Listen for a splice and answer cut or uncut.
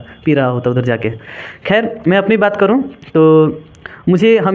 uncut